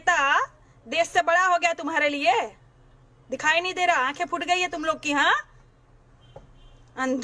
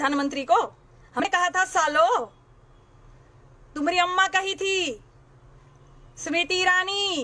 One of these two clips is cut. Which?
second; 1 cut; at 1.2 s

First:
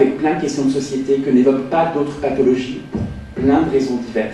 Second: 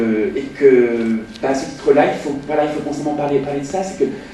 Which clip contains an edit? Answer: second; 1 cut; at 2.0 s

